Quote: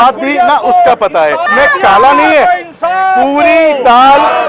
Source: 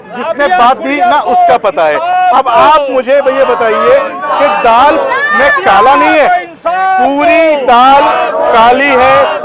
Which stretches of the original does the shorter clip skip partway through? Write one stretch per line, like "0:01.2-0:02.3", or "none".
0:02.0-0:05.2